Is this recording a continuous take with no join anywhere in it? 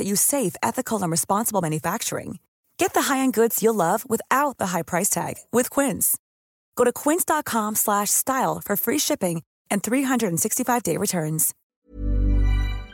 no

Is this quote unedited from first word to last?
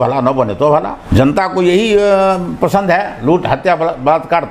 no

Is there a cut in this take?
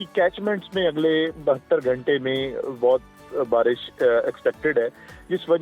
no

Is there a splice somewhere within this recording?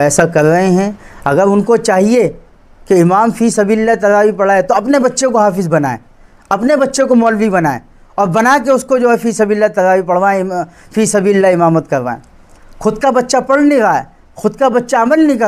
no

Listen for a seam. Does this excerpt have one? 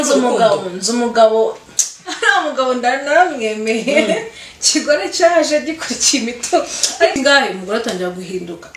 yes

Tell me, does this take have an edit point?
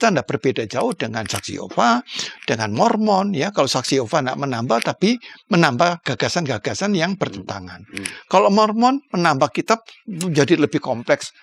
no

